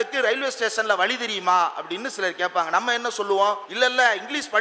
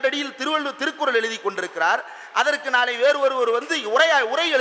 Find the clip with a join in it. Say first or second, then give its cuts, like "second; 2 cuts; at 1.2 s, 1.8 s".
first; 1 cut; at 3.7 s